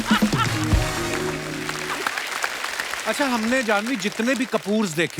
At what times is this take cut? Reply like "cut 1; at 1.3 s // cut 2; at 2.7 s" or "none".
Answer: cut 1; at 1.8 s // cut 2; at 3.0 s